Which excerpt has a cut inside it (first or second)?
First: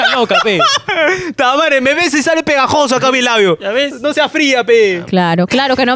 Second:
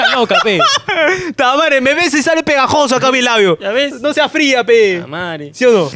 first